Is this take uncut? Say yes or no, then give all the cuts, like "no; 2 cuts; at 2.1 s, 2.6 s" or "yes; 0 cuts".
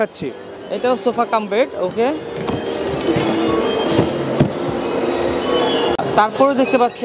no; 1 cut; at 6.0 s